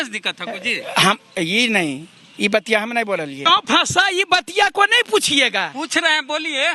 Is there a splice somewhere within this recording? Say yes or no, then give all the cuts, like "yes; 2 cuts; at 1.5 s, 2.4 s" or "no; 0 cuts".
yes; 1 cut; at 3.4 s